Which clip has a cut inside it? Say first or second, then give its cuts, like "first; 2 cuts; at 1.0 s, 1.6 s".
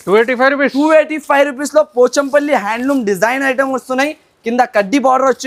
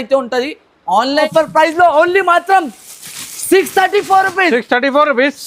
second; 1 cut; at 1.3 s